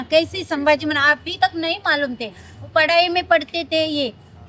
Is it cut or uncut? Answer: uncut